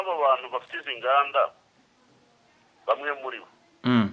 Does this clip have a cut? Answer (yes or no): no